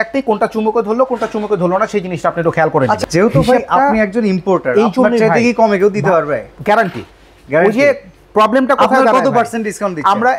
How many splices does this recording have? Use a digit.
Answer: 1